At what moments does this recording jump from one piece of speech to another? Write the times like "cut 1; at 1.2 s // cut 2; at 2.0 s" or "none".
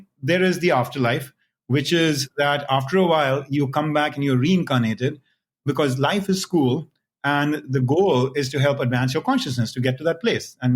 cut 1; at 5.6 s